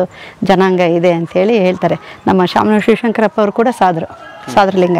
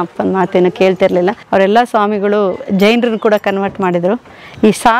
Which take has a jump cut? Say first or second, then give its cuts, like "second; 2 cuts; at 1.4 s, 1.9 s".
second; 1 cut; at 1.4 s